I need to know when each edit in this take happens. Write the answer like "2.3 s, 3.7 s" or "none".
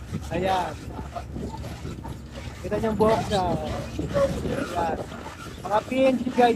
none